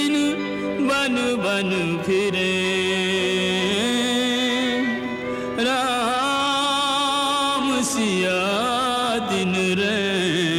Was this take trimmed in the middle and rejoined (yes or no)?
no